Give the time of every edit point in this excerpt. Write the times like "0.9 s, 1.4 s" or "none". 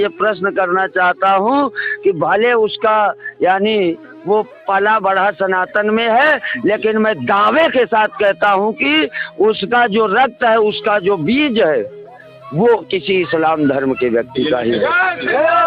none

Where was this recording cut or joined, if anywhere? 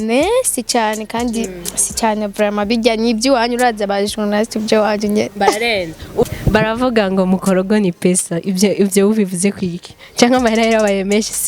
6.2 s

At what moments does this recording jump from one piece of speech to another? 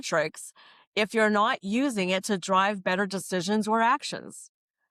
none

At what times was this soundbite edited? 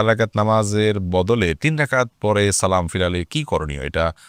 none

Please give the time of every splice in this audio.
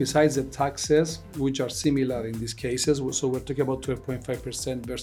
none

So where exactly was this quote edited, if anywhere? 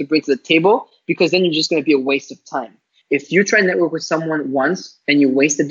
2.9 s

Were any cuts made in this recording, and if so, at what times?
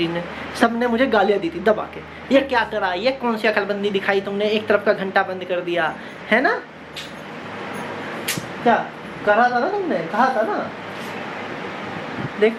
none

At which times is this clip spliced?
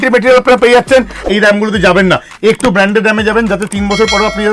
1.2 s

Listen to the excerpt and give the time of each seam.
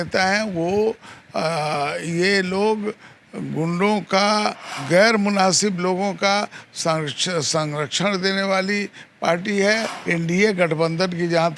4.7 s, 9.9 s

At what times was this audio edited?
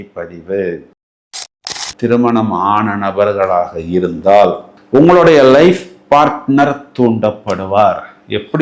1.3 s

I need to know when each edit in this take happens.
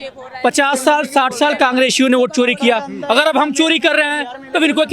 none

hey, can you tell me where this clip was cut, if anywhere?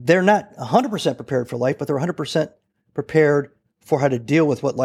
none

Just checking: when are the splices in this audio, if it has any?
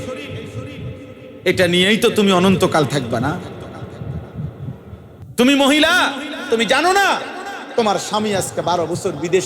5.1 s

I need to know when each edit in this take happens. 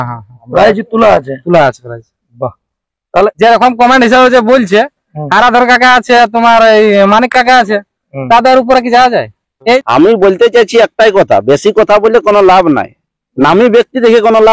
3.3 s, 9.8 s

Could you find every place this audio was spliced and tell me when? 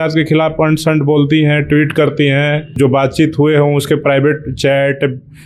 2.8 s

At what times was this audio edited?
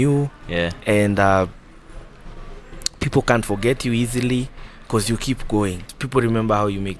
6.0 s

